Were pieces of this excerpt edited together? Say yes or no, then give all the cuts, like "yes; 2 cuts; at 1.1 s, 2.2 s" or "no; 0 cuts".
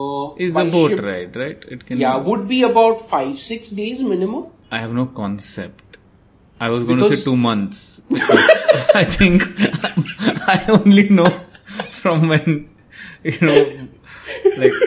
yes; 1 cut; at 4.6 s